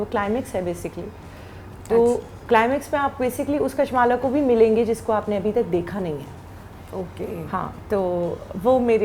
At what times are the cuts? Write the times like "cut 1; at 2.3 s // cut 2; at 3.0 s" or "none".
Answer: none